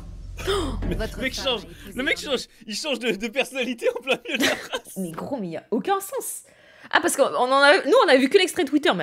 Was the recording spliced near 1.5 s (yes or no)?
no